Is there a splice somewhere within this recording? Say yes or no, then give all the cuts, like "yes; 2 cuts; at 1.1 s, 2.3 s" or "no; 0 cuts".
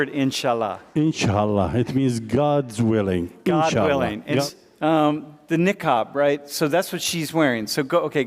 yes; 1 cut; at 4.4 s